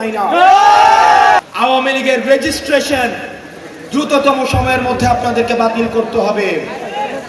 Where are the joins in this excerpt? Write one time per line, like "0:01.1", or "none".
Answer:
0:01.4